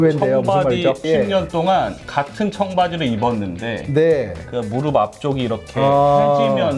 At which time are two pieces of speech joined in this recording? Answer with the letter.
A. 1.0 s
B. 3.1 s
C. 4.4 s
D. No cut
A